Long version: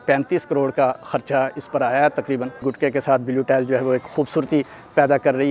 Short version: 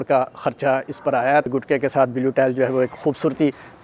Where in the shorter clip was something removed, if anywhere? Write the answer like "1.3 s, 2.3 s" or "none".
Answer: 1.5 s